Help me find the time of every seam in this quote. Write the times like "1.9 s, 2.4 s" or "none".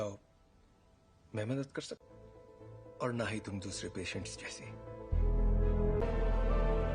6.0 s